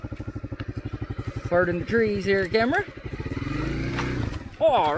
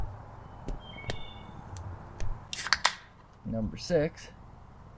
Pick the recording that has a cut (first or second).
second